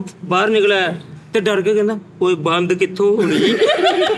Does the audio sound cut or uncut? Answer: uncut